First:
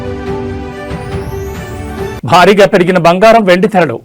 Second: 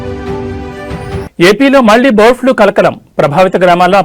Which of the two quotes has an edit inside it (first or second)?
second